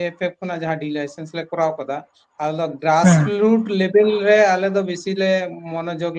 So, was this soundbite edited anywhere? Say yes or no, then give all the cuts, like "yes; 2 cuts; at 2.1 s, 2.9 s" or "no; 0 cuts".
no; 0 cuts